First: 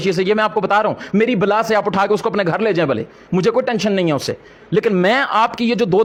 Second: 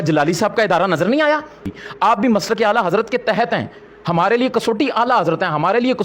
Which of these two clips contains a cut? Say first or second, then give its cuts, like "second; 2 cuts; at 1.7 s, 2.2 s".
second; 1 cut; at 1.8 s